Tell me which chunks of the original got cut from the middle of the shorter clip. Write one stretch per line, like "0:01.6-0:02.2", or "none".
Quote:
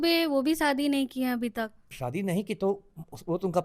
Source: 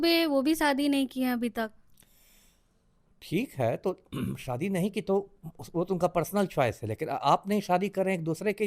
0:01.9-0:04.4

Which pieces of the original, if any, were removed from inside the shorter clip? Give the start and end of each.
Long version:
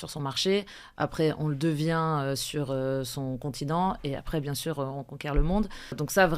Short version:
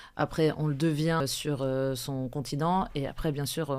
0:02.0-0:02.3

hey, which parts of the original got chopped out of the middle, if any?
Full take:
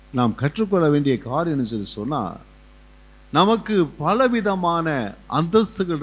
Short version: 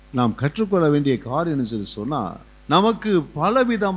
0:02.5-0:03.1

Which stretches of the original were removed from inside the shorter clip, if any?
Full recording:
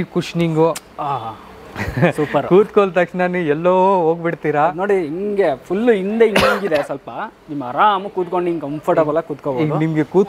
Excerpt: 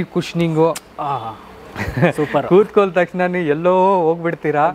none

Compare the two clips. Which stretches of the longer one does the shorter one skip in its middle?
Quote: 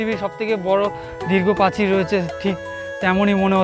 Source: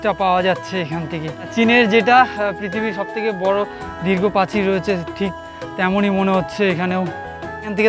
none

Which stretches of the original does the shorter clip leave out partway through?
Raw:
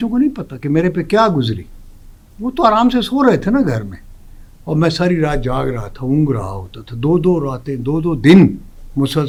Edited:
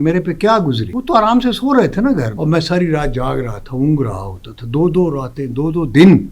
0:01.6-0:02.4
0:03.8-0:04.6

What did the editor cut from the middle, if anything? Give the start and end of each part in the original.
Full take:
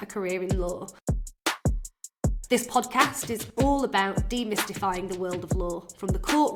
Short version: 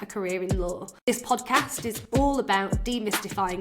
0:00.9-0:02.4

